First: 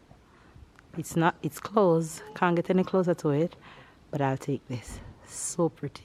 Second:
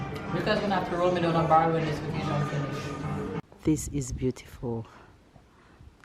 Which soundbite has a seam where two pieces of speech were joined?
second; 1 cut; at 3.5 s

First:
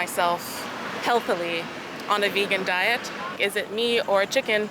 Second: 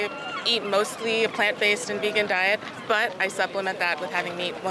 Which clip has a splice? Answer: first; 1 cut; at 3.4 s

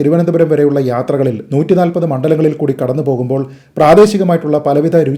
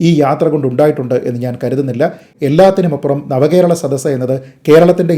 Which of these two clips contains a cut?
second; 1 cut; at 2.3 s

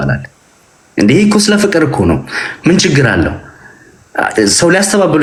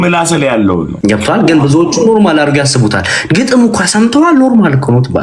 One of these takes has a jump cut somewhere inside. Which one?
second; 1 cut; at 0.9 s

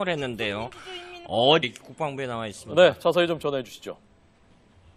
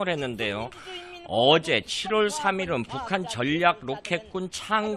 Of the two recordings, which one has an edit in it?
second; 1 cut; at 1.6 s

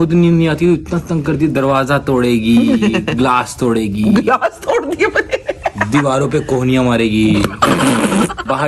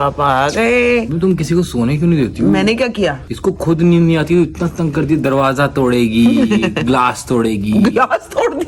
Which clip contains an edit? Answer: second; 1 cut; at 1.1 s

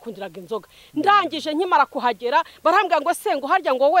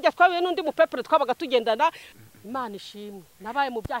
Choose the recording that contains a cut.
second; 1 cut; at 2.1 s

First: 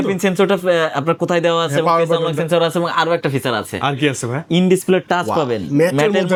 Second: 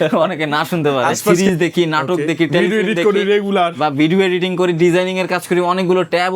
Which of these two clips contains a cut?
second; 1 cut; at 1.3 s

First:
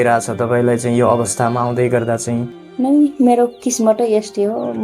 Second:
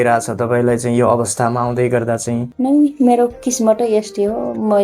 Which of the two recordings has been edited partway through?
second; 1 cut; at 2.5 s

